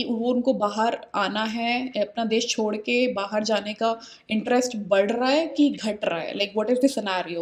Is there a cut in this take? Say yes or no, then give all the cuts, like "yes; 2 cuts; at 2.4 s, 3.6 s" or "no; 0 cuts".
no; 0 cuts